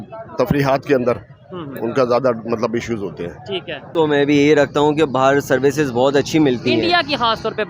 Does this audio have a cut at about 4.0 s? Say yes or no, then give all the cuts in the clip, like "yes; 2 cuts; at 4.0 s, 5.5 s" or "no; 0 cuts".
yes; 1 cut; at 4.0 s